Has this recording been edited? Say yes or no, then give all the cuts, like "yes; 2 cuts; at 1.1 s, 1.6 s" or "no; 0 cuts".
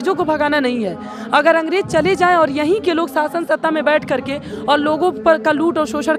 no; 0 cuts